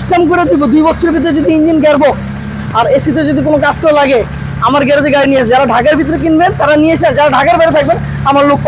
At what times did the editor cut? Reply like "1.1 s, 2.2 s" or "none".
none